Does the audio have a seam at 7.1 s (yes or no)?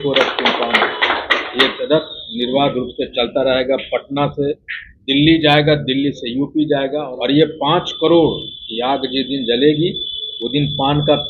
yes